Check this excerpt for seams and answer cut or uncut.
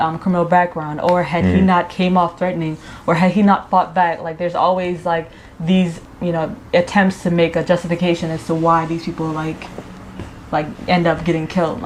uncut